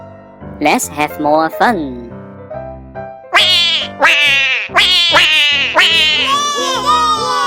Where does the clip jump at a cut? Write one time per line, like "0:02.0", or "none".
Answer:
0:06.1